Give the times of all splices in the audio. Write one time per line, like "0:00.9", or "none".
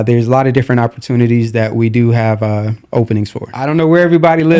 0:03.6